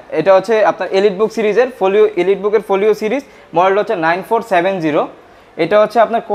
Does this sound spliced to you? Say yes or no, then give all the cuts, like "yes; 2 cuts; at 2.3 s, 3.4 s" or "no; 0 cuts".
no; 0 cuts